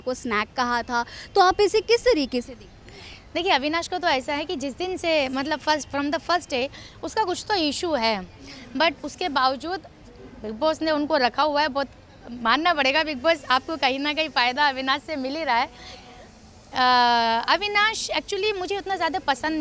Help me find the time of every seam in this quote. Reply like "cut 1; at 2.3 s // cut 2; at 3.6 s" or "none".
none

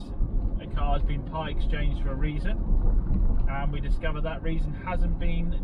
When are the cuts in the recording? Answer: none

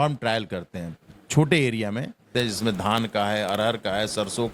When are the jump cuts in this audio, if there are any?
cut 1; at 2.3 s

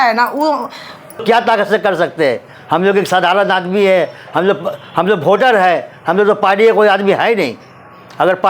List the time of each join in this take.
cut 1; at 1.2 s

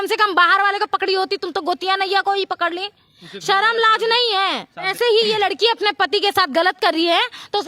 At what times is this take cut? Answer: cut 1; at 4.9 s

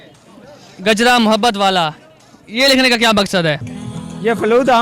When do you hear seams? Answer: cut 1; at 3.7 s

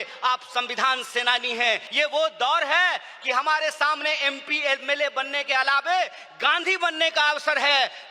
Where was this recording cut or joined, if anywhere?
cut 1; at 1.9 s

